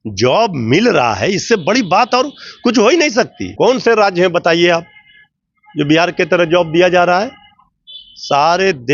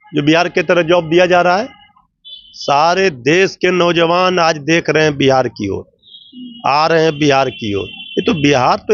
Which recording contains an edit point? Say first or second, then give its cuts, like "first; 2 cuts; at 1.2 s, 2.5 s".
first; 1 cut; at 3.4 s